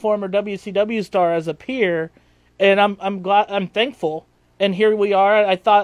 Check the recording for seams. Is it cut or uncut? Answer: uncut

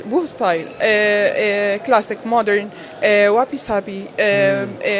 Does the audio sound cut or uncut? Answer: uncut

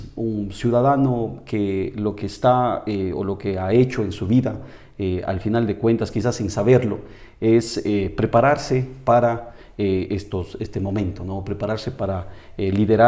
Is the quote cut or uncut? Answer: uncut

